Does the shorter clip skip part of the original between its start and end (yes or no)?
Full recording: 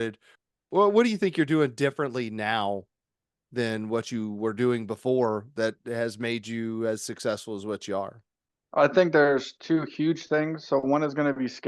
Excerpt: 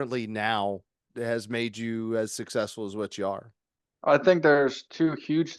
yes